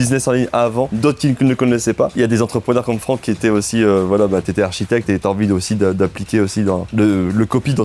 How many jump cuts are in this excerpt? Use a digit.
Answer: 3